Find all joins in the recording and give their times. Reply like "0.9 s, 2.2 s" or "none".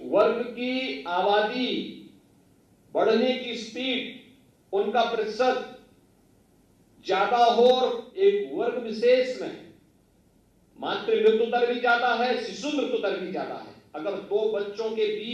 8.0 s